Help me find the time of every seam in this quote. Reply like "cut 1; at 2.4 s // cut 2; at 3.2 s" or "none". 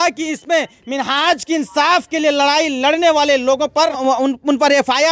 cut 1; at 4.0 s